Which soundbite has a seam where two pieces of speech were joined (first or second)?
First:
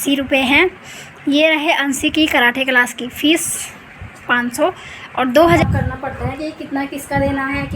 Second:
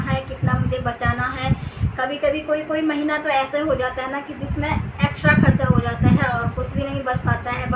first